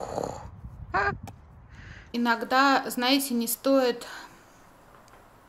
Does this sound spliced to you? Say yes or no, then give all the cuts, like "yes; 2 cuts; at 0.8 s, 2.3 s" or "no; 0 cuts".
yes; 1 cut; at 2.1 s